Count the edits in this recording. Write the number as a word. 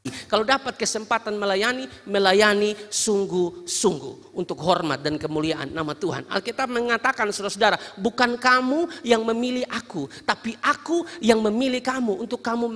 zero